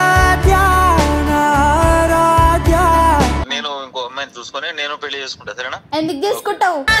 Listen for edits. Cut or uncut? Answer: cut